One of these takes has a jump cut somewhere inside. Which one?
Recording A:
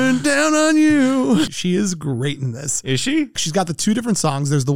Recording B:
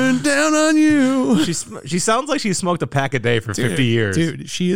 A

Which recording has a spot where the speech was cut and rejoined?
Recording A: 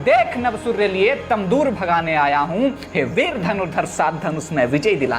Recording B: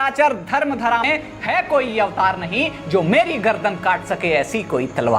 B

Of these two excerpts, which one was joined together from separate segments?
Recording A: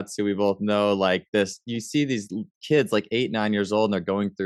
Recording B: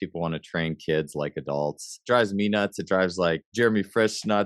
B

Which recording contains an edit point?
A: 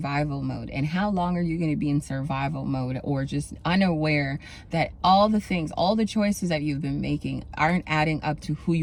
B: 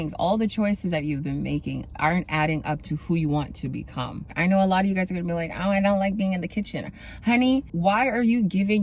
B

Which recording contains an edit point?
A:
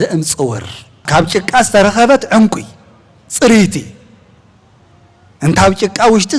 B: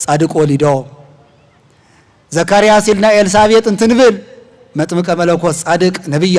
A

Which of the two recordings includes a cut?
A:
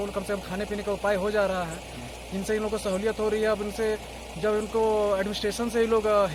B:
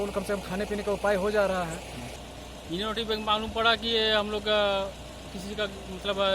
B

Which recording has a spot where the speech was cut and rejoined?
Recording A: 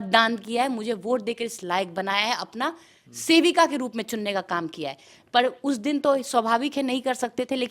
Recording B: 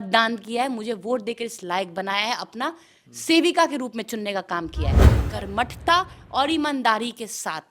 B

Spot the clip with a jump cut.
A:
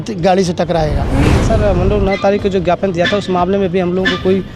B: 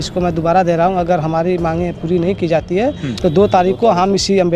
A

